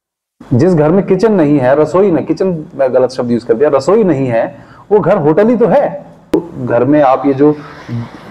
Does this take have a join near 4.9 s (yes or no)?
no